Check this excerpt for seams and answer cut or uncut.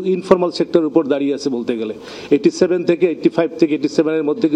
uncut